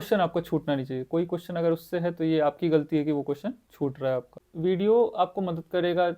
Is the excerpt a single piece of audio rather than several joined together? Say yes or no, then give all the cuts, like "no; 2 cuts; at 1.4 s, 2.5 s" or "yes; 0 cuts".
no; 1 cut; at 4.4 s